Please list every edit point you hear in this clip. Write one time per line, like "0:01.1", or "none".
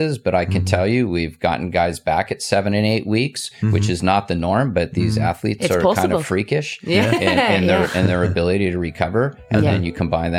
none